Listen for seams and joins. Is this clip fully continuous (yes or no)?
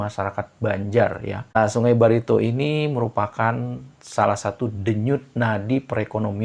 no